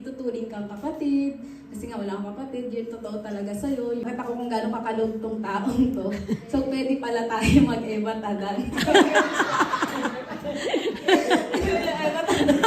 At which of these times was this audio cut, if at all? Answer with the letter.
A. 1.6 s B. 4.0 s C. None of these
B